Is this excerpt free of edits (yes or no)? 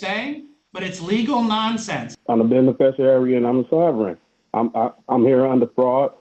no